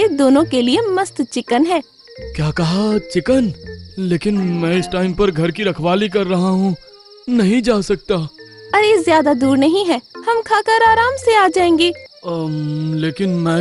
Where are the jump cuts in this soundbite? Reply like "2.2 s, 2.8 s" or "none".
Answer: 12.1 s